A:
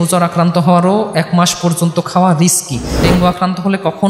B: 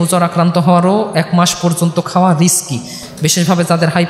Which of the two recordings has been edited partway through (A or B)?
A